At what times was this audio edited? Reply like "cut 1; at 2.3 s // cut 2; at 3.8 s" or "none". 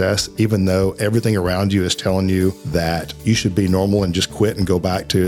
cut 1; at 3.0 s